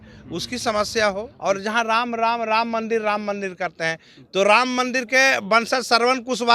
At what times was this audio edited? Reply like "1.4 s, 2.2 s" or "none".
1.3 s